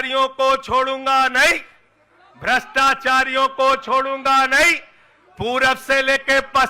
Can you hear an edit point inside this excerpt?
no; 0 cuts

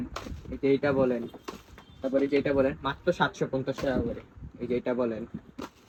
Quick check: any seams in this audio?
no; 0 cuts

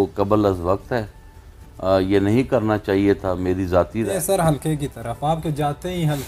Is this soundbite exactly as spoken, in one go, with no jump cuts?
no; 1 cut; at 4.1 s

